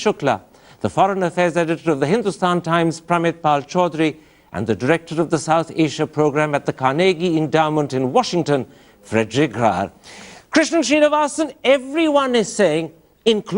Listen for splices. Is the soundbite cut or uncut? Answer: cut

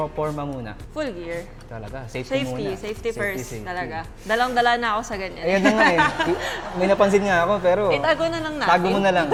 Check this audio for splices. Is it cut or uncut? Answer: uncut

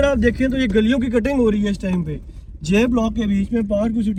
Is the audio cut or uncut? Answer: uncut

